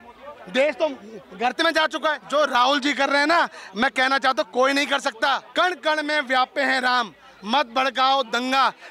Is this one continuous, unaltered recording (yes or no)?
no